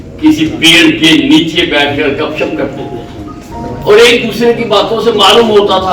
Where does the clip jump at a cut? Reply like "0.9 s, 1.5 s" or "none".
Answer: 3.5 s